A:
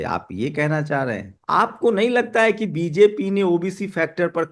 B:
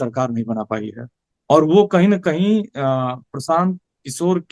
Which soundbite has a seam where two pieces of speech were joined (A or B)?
A